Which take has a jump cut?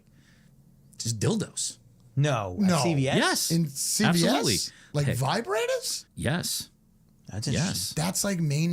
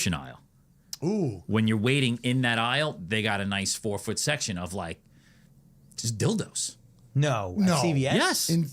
first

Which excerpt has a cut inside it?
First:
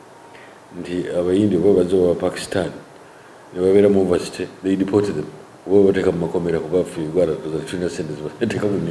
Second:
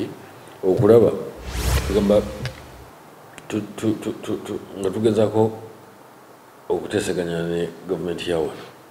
second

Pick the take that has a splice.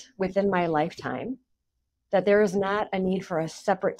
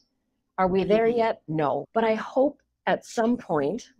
second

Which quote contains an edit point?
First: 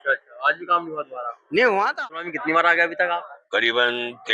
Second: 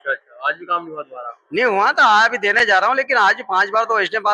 first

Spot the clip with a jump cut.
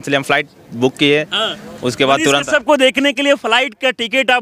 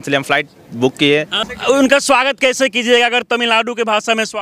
second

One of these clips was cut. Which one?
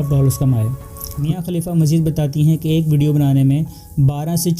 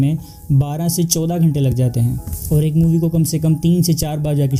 first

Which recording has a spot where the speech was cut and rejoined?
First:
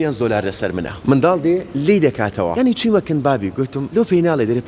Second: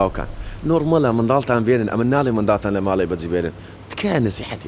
first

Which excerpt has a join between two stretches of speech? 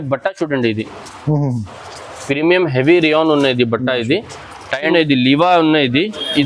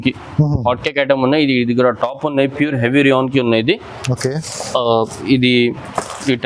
first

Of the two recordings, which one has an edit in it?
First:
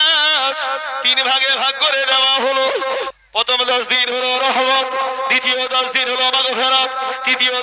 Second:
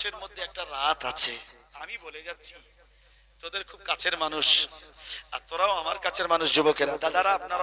first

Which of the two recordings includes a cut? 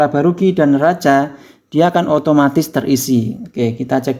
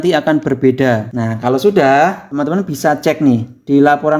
second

